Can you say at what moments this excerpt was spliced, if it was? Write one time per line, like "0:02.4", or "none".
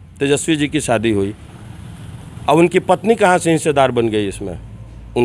none